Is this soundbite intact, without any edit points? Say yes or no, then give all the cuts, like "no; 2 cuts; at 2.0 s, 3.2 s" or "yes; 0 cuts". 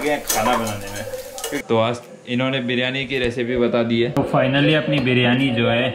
no; 2 cuts; at 1.6 s, 4.1 s